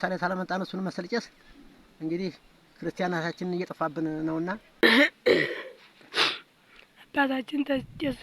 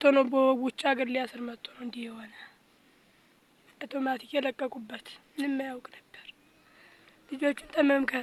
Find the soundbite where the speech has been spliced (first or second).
first